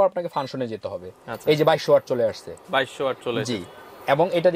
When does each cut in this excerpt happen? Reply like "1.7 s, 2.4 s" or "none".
none